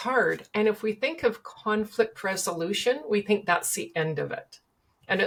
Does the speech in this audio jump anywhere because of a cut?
no; 0 cuts

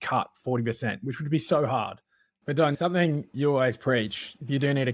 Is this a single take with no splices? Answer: no; 1 cut; at 2.7 s

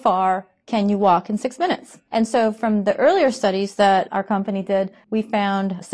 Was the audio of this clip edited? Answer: yes; 2 cuts; at 1.9 s, 5.0 s

